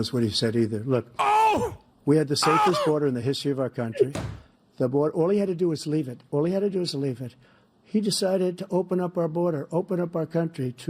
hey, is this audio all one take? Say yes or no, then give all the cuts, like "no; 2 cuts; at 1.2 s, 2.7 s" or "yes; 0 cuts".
yes; 0 cuts